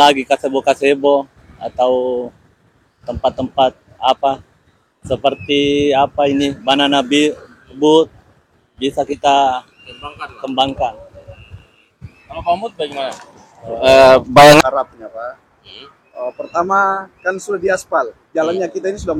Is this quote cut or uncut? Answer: cut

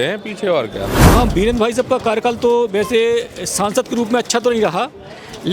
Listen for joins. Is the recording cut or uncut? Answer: cut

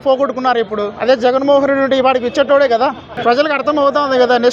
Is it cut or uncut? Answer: cut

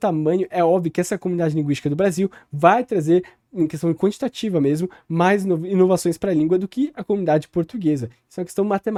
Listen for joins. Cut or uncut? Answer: uncut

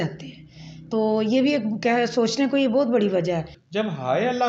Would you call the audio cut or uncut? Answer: cut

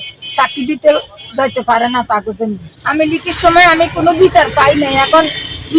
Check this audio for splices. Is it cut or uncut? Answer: cut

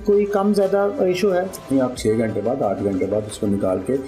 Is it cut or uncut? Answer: cut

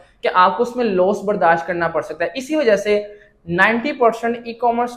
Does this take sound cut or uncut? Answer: uncut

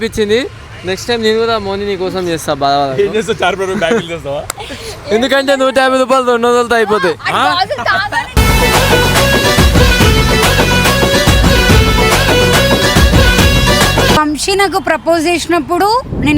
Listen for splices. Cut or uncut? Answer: cut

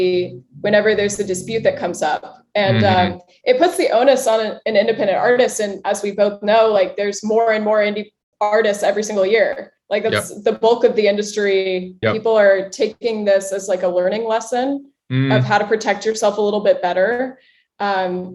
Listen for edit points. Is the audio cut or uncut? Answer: cut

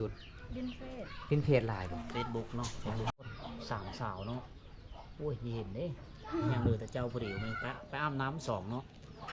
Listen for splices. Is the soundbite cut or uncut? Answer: uncut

